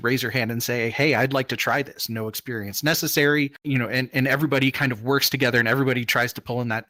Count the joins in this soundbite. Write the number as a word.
one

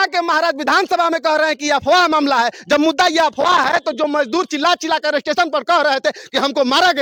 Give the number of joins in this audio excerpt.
zero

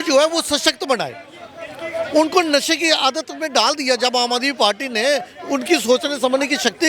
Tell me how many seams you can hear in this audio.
zero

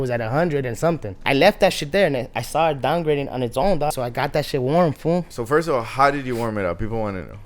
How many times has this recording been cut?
three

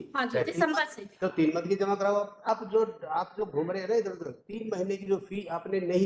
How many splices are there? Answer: one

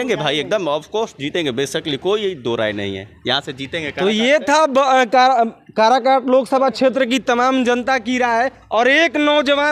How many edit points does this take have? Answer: zero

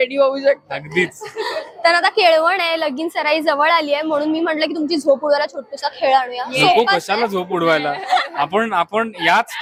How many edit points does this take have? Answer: zero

